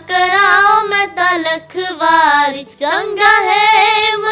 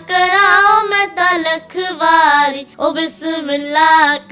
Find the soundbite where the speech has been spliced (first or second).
first